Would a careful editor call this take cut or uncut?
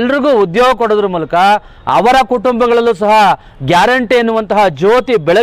uncut